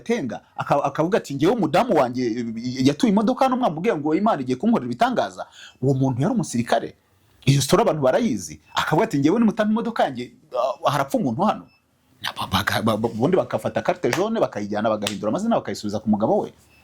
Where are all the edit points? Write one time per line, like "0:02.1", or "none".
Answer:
none